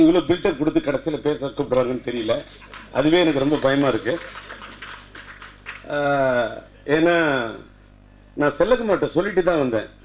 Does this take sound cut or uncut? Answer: uncut